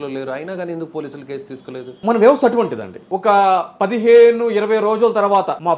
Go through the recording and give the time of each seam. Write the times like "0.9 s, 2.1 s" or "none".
none